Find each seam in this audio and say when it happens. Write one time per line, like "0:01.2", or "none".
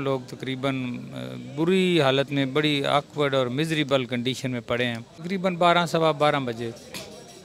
0:05.2